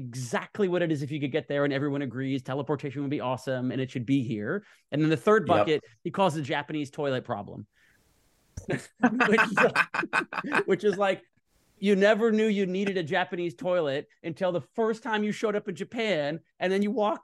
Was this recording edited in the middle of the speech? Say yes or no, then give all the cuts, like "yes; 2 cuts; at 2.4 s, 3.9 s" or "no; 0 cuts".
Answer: no; 0 cuts